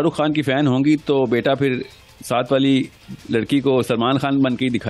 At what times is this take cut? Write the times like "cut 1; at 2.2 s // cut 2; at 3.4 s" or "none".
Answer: none